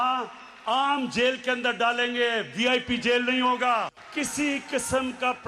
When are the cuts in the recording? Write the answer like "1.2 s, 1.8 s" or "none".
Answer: 4.0 s